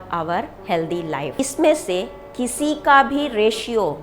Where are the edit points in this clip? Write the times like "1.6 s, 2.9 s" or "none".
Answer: 1.4 s